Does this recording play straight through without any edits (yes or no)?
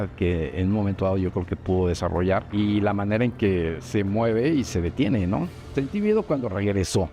no